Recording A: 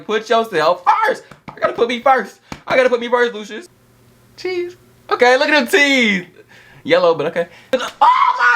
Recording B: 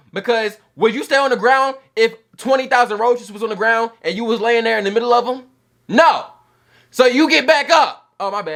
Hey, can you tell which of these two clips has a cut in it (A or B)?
A